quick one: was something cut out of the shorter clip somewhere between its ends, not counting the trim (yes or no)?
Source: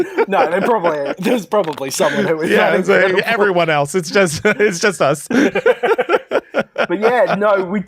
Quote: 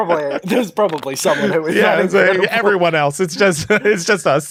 no